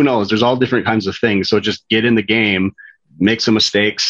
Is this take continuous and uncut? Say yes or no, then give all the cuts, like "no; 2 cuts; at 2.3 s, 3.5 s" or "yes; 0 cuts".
yes; 0 cuts